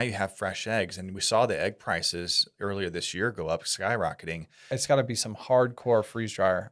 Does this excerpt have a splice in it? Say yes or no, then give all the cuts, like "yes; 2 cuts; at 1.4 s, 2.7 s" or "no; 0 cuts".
yes; 1 cut; at 4.8 s